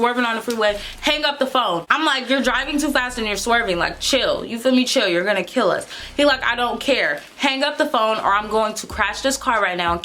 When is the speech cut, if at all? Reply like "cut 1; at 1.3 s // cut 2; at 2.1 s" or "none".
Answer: cut 1; at 1.9 s